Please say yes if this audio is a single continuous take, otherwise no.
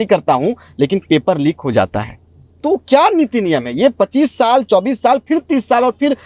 yes